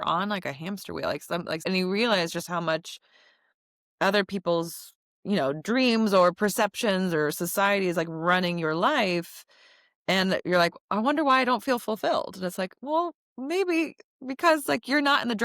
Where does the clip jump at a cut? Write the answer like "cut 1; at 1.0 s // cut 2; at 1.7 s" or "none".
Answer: cut 1; at 1.6 s